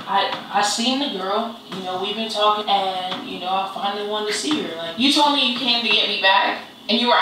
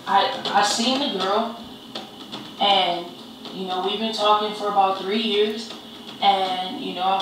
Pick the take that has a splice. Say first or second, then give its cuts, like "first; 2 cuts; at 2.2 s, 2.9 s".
first; 3 cuts; at 1.7 s, 2.6 s, 4.8 s